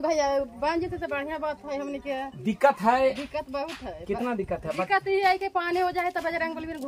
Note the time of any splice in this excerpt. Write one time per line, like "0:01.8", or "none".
none